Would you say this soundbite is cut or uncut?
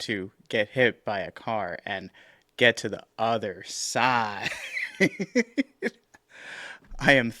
uncut